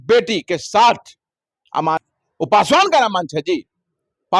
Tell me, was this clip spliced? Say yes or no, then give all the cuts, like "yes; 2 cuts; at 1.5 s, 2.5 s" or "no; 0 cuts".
yes; 1 cut; at 2.0 s